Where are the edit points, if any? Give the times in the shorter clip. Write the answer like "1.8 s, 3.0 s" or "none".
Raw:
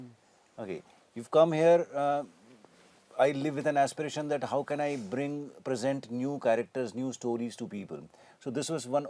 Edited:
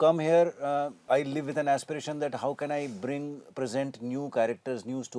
1.0 s